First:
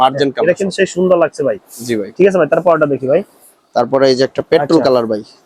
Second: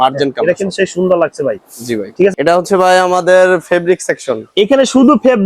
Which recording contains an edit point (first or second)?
second